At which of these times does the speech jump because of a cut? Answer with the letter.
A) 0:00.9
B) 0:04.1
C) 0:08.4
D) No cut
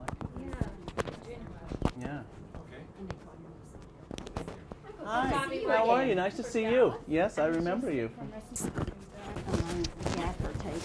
C